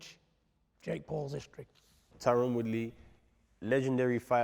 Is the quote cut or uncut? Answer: cut